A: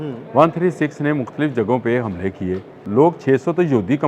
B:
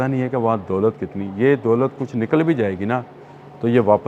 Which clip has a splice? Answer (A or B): A